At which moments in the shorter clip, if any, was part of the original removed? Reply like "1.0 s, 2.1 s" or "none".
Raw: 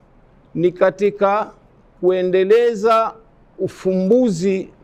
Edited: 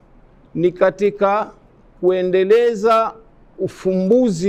none